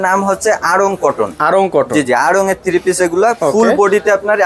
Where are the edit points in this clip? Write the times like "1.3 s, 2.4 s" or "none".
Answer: none

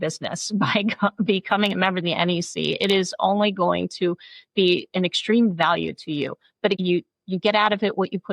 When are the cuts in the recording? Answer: 6.8 s

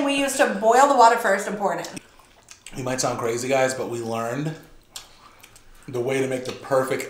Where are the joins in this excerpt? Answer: 1.9 s

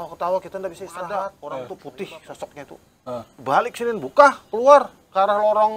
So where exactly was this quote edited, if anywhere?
1.1 s

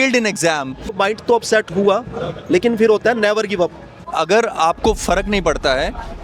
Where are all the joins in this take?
1.0 s, 4.0 s

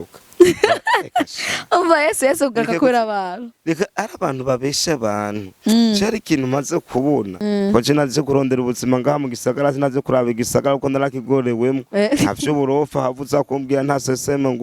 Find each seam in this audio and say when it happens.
7.3 s

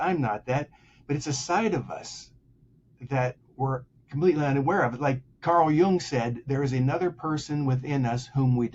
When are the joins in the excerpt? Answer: none

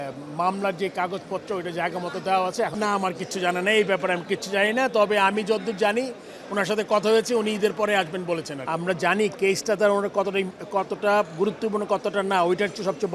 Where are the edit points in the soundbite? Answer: 2.7 s, 8.6 s

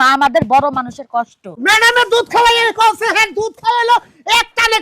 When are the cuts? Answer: 1.5 s

